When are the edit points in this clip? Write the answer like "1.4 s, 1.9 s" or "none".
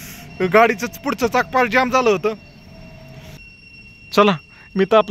3.4 s